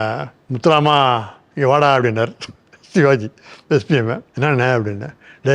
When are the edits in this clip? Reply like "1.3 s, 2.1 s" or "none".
4.3 s